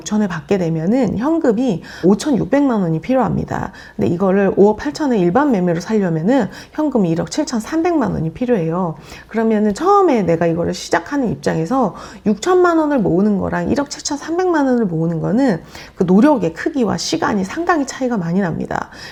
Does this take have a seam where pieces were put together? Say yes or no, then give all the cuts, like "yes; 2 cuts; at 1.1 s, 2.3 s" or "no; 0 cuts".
no; 0 cuts